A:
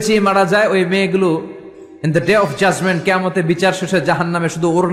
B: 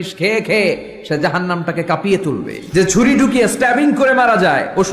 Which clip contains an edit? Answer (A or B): B